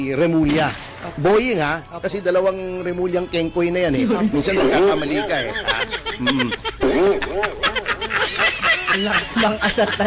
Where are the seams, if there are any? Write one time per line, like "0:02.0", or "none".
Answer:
0:06.8